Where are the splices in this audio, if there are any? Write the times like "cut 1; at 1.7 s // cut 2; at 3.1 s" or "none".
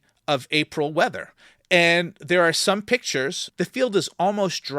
cut 1; at 3.4 s